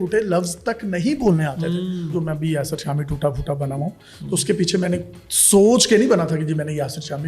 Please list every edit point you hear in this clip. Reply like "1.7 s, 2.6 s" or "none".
2.1 s